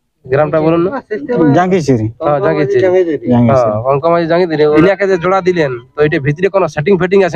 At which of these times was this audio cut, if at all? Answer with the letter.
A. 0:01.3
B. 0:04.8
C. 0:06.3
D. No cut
B